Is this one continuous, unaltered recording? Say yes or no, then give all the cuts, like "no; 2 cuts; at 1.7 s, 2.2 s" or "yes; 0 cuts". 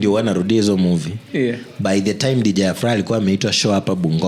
yes; 0 cuts